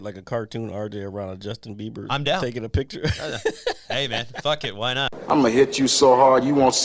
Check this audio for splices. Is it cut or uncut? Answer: cut